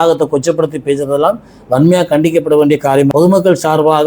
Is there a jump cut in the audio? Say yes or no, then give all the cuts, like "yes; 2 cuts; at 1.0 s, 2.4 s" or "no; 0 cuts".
yes; 1 cut; at 3.1 s